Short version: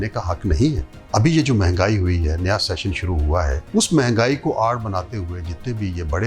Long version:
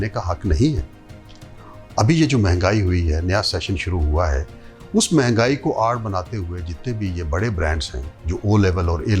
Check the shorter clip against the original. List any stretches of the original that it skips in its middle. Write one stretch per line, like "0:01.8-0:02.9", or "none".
0:00.9-0:01.8
0:04.4-0:04.8